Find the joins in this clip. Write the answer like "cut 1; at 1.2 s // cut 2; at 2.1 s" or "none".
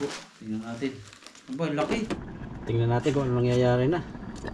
cut 1; at 2.1 s

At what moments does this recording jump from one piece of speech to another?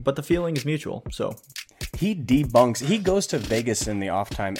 cut 1; at 1.5 s

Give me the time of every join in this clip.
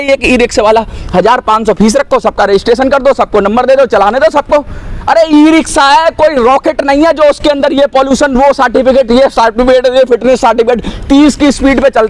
none

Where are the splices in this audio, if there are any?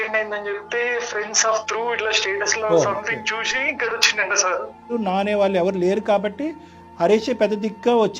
cut 1; at 4.9 s

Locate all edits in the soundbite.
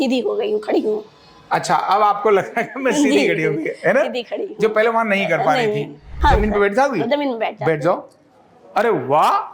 cut 1; at 6.1 s

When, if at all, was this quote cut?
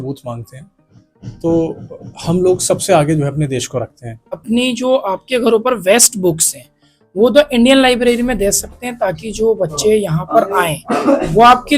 cut 1; at 4.3 s

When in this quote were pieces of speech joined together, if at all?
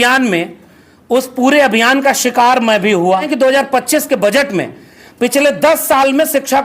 cut 1; at 3.3 s

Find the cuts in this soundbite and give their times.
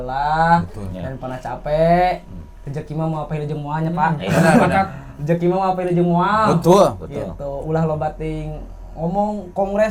none

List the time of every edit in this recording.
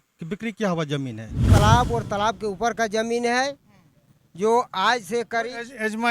cut 1; at 1.5 s

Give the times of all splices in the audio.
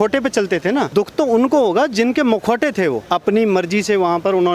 cut 1; at 0.9 s // cut 2; at 3.0 s

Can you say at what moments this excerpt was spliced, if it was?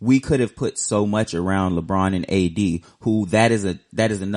none

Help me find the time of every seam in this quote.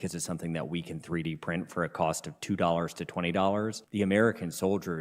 cut 1; at 3.8 s

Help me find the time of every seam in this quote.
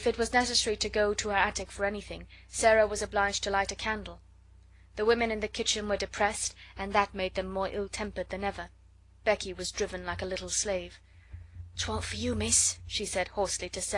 cut 1; at 8.7 s

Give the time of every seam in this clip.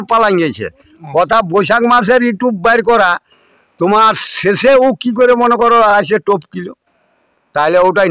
none

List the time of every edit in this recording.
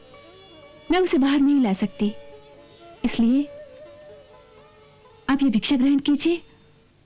none

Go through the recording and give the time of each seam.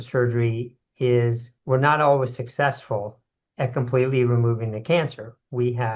cut 1; at 1.5 s

